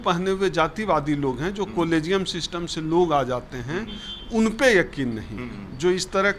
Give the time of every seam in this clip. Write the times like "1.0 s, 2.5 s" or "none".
none